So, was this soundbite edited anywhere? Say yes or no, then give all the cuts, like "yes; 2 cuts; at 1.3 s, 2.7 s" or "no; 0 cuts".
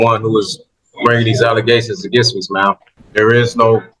yes; 1 cut; at 2.9 s